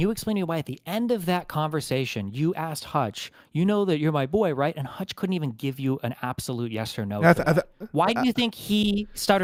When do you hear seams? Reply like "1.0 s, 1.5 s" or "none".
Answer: none